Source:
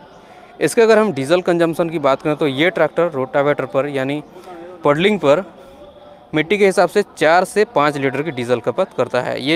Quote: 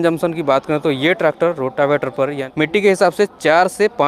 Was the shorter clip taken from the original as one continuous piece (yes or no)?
no